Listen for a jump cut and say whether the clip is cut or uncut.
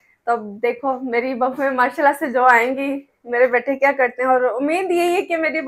uncut